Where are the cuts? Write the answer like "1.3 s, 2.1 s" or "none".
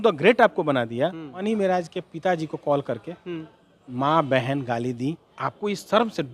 1.3 s, 5.3 s